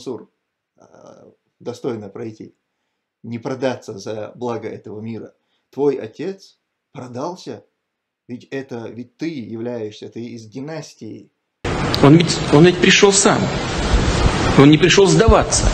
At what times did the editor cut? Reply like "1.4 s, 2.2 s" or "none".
11.6 s